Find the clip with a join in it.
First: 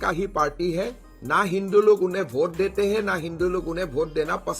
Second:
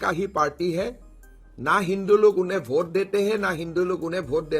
first; 1 cut; at 1.4 s

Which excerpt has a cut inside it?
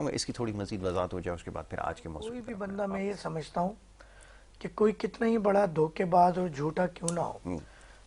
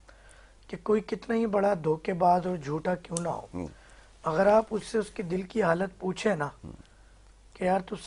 first; 1 cut; at 2.5 s

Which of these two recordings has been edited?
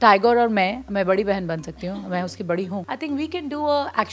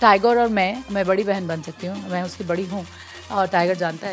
first; 1 cut; at 2.8 s

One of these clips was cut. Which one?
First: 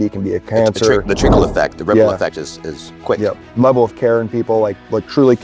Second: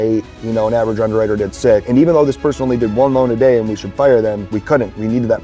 second; 2 cuts; at 1.8 s, 4.5 s

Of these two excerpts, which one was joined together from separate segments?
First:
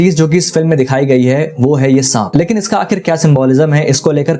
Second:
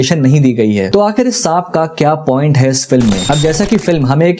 second; 1 cut; at 3.2 s

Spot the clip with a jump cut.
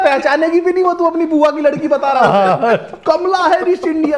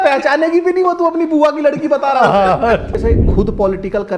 second; 1 cut; at 3.0 s

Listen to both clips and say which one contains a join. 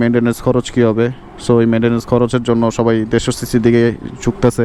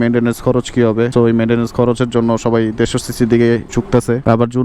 second; 2 cuts; at 1.1 s, 3.7 s

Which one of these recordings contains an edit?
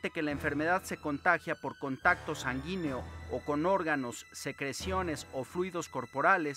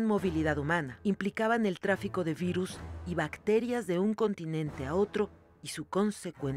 second; 1 cut; at 0.9 s

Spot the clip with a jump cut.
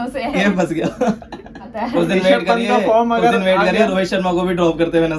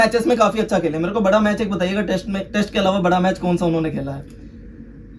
first; 1 cut; at 1.8 s

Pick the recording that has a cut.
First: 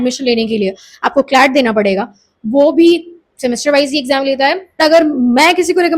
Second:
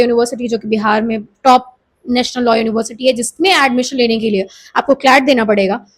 first; 1 cut; at 4.7 s

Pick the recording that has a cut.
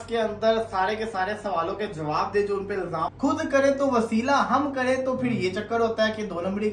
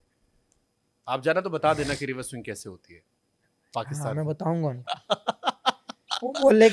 first; 1 cut; at 3.1 s

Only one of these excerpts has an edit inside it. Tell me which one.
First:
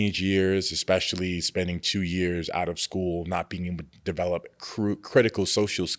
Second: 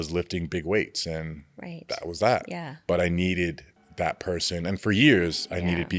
second; 1 cut; at 2.5 s

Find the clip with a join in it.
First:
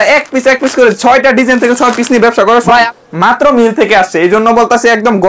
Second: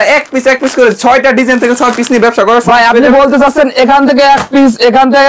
first; 1 cut; at 2.9 s

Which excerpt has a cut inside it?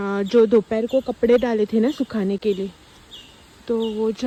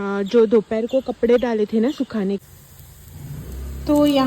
second; 1 cut; at 2.4 s

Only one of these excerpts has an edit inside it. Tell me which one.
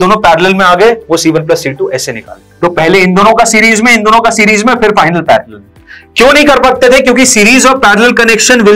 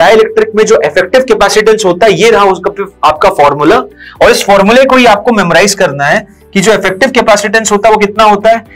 first; 1 cut; at 2.5 s

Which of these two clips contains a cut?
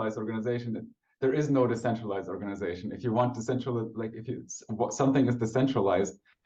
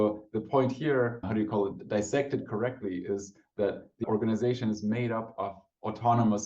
second; 2 cuts; at 1.3 s, 4.0 s

